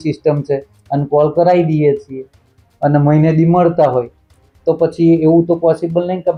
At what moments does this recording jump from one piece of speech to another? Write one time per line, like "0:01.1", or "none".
none